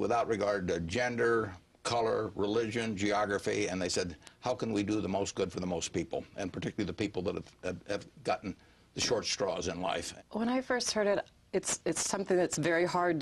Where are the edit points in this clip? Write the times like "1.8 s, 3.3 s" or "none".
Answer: 10.1 s